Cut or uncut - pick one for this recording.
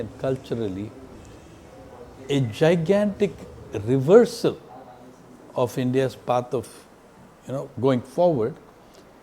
uncut